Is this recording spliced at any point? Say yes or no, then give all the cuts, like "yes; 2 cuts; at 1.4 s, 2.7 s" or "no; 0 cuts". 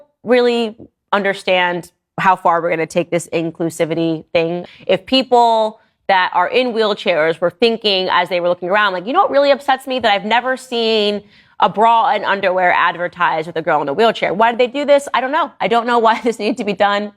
yes; 1 cut; at 4.6 s